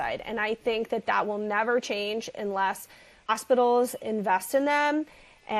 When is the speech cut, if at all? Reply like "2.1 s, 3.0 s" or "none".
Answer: 3.3 s